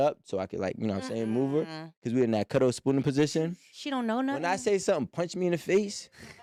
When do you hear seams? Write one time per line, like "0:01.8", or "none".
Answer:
none